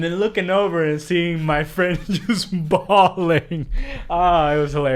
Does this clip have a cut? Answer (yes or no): no